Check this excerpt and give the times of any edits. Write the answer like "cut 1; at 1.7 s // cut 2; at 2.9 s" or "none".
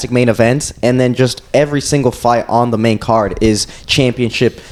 none